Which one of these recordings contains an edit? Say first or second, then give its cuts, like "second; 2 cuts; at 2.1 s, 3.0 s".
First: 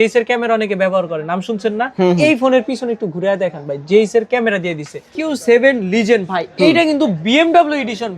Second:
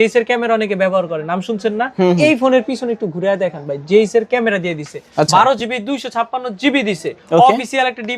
first; 1 cut; at 5.1 s